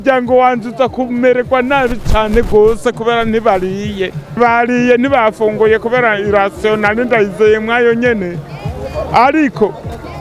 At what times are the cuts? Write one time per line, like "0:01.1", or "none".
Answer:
0:04.4